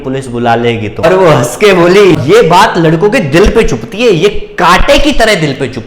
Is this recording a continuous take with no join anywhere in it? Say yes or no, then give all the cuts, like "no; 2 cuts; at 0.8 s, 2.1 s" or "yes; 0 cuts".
no; 2 cuts; at 1.0 s, 2.2 s